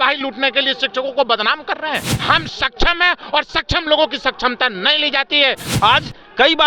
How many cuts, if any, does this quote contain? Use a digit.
2